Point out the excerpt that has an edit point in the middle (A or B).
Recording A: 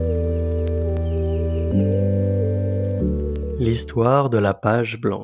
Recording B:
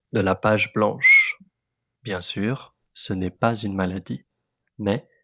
A